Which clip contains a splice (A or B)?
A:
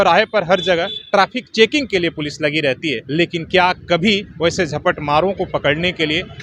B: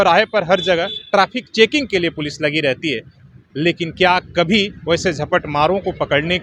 A